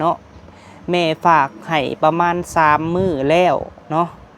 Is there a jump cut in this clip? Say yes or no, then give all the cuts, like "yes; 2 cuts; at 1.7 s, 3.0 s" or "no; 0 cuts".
no; 0 cuts